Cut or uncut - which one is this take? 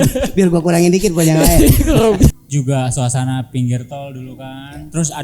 cut